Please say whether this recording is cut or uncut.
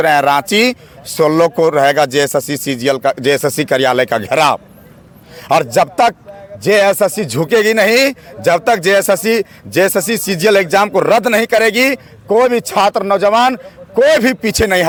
uncut